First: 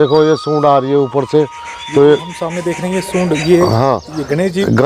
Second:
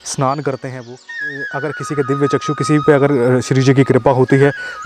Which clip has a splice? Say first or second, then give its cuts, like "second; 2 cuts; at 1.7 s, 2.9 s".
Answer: second; 1 cut; at 1.3 s